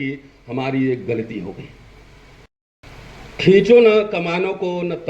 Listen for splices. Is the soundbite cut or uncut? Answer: cut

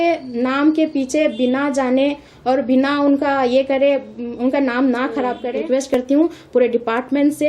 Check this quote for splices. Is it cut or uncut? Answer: cut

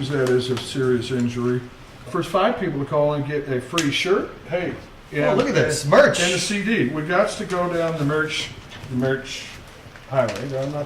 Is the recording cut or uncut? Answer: cut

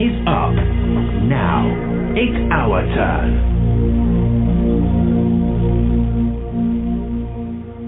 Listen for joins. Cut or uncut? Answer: cut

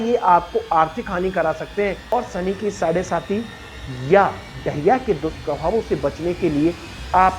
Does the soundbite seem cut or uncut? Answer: cut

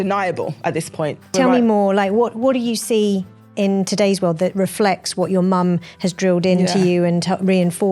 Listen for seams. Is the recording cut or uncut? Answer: cut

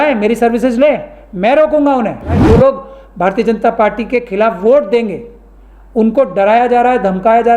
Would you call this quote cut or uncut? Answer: cut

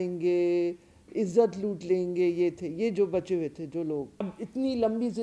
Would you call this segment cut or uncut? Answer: cut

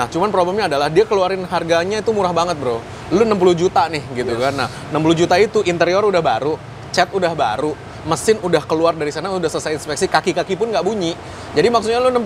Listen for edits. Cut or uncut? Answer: uncut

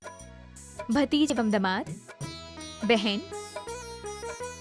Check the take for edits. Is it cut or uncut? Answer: cut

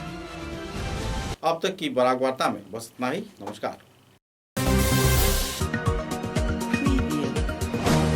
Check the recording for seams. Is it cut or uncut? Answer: uncut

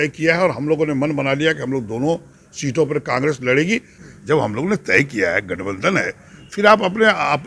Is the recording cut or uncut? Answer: cut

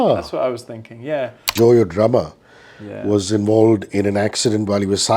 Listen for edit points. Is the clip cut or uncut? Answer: cut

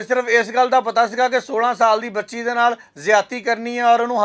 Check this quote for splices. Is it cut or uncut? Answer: uncut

